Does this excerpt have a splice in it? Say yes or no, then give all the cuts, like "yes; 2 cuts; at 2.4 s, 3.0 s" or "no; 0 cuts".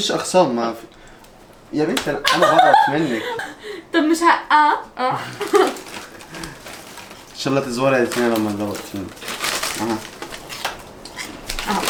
no; 0 cuts